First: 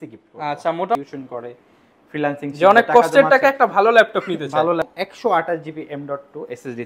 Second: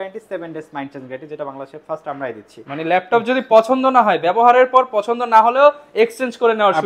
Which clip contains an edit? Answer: first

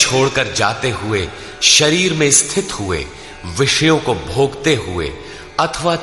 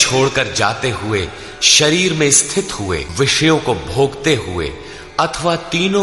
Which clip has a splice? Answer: second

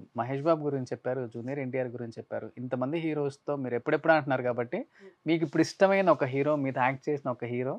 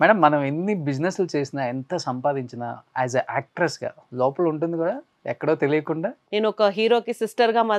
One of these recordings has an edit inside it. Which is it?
second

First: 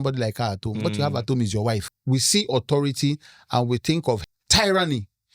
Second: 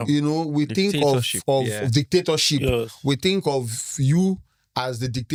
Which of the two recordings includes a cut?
first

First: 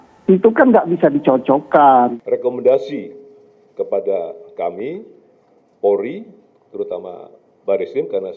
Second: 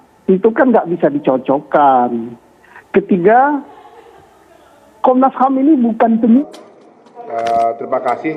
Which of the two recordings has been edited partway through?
first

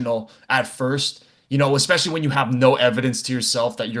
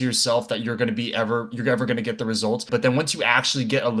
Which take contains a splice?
second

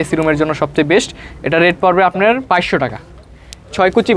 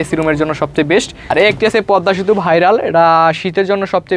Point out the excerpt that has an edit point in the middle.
second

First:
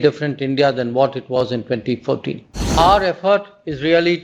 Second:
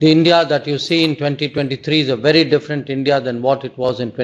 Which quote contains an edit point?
first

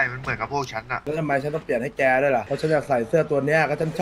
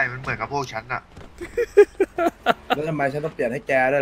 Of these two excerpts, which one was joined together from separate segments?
first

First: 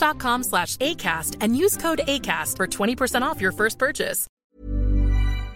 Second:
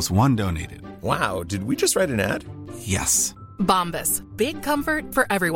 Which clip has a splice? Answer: first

